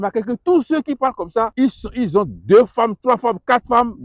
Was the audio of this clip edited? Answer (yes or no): yes